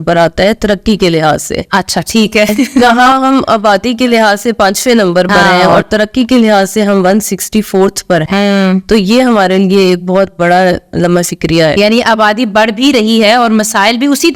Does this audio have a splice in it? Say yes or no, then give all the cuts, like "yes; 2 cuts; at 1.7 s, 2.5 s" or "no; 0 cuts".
no; 0 cuts